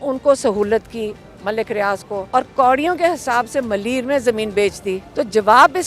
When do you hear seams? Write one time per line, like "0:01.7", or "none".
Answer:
0:02.2
0:05.0